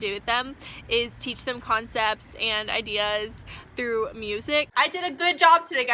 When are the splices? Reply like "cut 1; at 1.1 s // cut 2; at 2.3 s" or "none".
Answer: cut 1; at 4.7 s